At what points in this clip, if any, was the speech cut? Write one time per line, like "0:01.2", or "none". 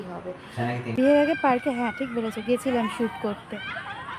0:00.9